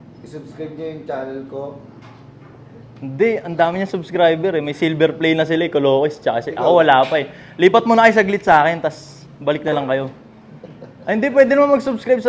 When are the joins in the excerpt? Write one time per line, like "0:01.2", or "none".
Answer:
none